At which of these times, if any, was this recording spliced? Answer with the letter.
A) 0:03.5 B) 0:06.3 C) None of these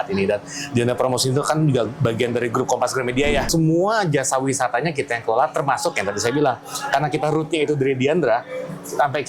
A